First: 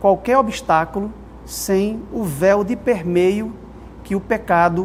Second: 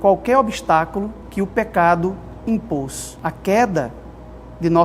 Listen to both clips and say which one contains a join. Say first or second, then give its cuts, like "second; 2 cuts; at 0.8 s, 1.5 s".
second; 2 cuts; at 1.2 s, 3.0 s